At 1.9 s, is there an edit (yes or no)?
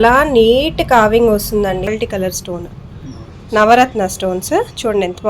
yes